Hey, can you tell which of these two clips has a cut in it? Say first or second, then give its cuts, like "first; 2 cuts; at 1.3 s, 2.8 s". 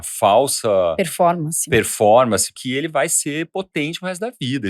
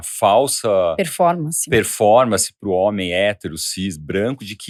first; 1 cut; at 2.5 s